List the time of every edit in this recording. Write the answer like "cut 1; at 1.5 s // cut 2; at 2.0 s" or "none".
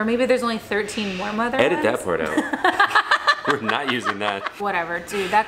cut 1; at 4.5 s